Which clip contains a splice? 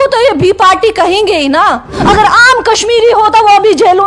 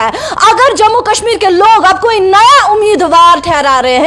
first; 1 cut; at 2.0 s

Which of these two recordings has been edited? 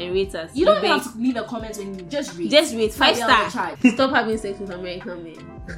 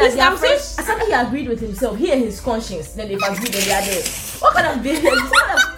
first; 1 cut; at 3.7 s

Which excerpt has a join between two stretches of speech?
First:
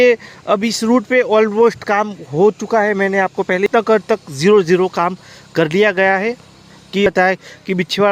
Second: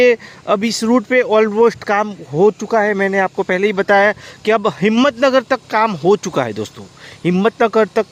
first; 2 cuts; at 3.7 s, 7.1 s

